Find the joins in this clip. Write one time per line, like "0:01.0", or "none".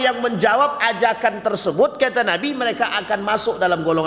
none